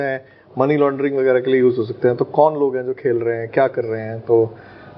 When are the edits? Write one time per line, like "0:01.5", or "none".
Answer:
none